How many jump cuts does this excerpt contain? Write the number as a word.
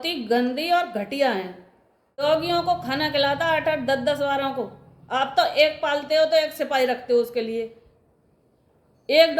one